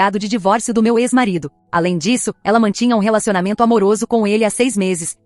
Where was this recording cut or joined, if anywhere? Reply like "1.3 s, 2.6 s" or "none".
1.6 s